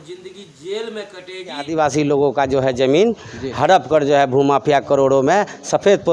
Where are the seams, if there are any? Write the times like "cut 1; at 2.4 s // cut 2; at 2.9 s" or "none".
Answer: cut 1; at 1.7 s